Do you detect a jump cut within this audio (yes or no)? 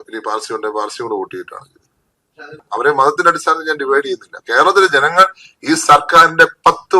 yes